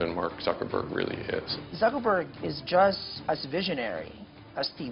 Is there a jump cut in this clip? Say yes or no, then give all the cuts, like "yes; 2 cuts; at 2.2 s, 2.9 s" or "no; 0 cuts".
yes; 2 cuts; at 1.6 s, 3.1 s